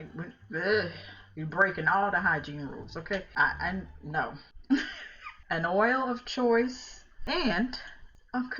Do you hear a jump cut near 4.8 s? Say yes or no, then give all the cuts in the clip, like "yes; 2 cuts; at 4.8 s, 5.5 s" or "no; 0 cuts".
no; 0 cuts